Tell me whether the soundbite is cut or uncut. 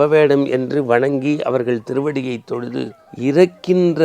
cut